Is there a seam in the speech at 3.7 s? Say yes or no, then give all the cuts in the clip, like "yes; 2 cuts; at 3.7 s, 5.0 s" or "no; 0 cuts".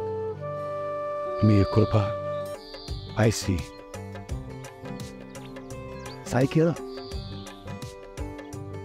no; 1 cut; at 2.5 s